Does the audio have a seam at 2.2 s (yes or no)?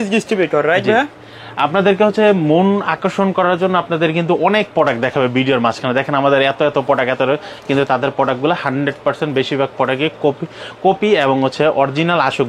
no